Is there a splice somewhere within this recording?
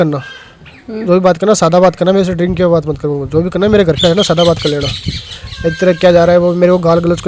no; 0 cuts

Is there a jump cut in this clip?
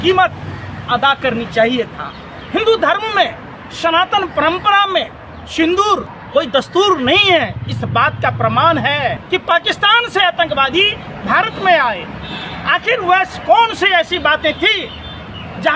yes; 2 cuts; at 6.2 s, 9.2 s

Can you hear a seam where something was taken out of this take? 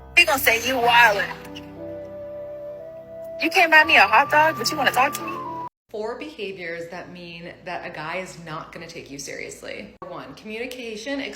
yes; 1 cut; at 5.7 s

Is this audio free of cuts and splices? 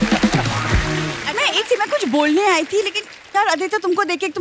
no; 1 cut; at 1.2 s

